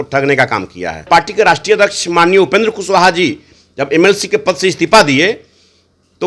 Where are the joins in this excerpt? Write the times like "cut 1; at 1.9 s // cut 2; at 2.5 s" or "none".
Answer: cut 1; at 1.1 s